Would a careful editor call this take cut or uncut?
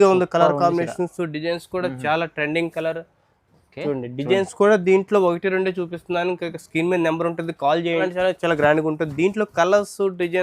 cut